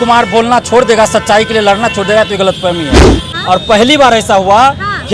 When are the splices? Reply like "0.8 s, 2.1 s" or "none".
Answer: 3.3 s

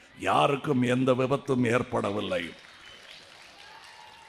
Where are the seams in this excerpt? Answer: none

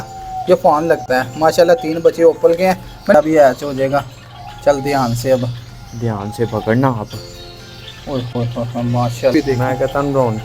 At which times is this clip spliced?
3.1 s, 9.3 s

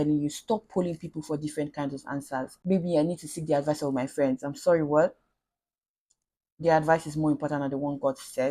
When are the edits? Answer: 2.5 s

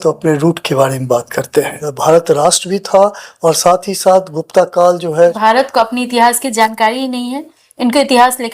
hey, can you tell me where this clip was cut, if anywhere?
1.8 s, 5.4 s

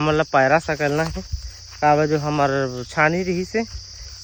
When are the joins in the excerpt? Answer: none

